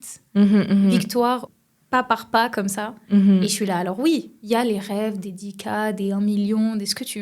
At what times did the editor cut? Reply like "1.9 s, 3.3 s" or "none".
1.5 s